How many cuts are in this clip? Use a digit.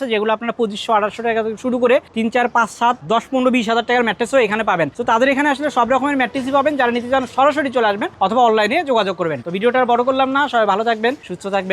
0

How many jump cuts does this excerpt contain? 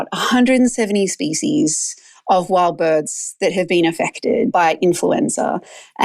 1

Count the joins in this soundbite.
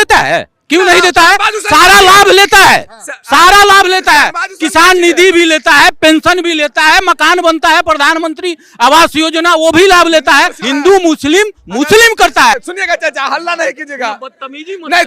2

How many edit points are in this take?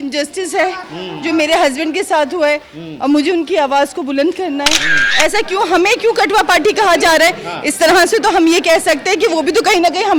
1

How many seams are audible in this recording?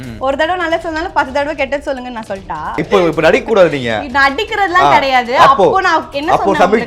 1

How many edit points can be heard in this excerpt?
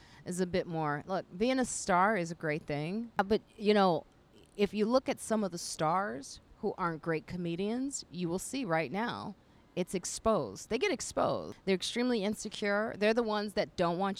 2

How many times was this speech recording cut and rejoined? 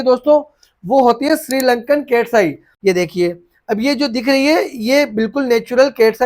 1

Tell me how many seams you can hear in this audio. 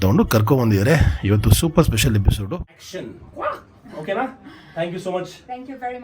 1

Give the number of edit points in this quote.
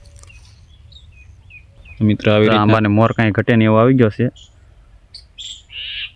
1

